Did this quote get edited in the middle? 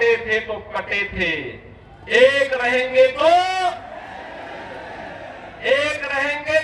no; 0 cuts

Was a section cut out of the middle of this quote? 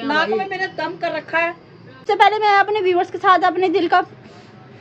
yes; 1 cut; at 2.0 s

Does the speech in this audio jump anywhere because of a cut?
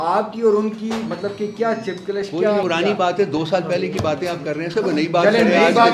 yes; 1 cut; at 2.6 s

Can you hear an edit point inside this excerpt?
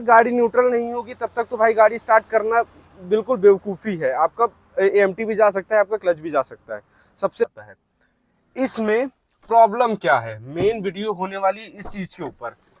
yes; 1 cut; at 7.4 s

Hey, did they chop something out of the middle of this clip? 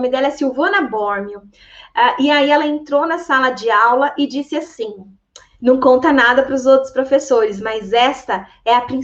no; 0 cuts

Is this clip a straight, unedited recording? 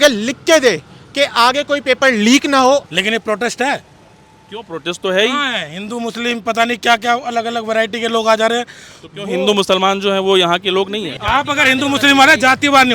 no; 2 cuts; at 2.8 s, 11.1 s

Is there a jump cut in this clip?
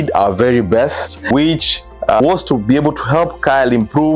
yes; 1 cut; at 1.3 s

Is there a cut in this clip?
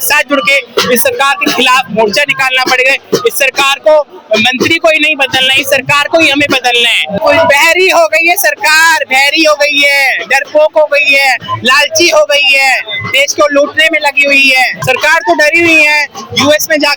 yes; 2 cuts; at 7.2 s, 14.8 s

